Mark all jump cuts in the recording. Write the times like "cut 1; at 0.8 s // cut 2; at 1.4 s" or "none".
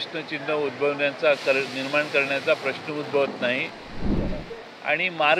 cut 1; at 4.1 s